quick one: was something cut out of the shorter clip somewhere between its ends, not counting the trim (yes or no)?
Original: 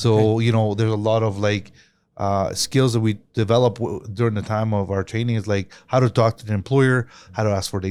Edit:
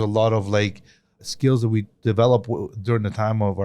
yes